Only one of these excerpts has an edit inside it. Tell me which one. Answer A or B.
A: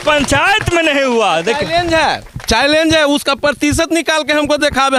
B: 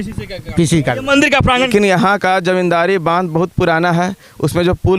B